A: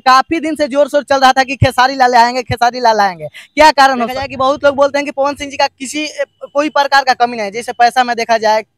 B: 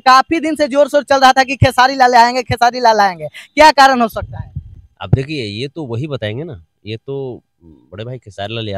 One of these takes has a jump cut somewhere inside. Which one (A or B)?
A